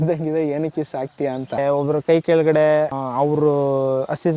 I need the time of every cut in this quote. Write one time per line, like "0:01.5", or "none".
0:01.6
0:03.0